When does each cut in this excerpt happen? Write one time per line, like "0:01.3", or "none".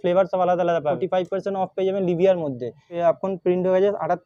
0:01.0
0:02.9